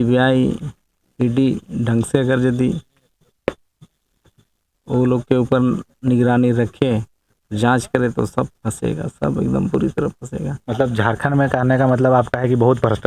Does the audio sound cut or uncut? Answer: uncut